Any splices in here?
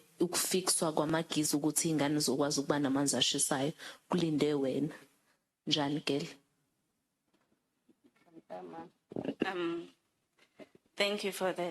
no; 0 cuts

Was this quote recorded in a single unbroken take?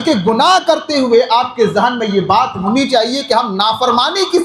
yes; 0 cuts

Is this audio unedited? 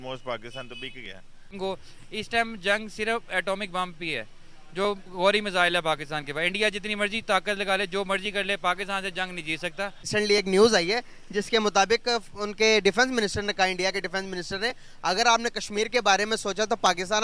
no; 2 cuts; at 1.6 s, 10.1 s

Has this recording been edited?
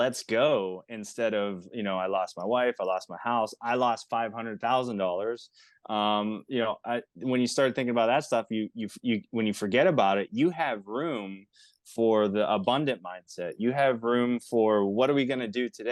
no; 0 cuts

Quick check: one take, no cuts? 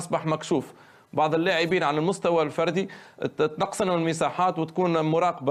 yes; 0 cuts

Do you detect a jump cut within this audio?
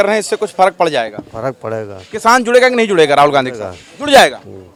no; 0 cuts

